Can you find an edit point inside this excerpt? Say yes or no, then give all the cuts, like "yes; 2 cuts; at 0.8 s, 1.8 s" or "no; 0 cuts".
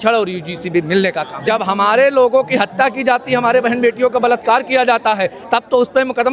yes; 1 cut; at 1.3 s